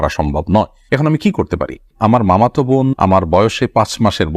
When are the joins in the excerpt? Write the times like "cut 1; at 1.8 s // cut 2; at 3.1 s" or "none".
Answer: cut 1; at 1.9 s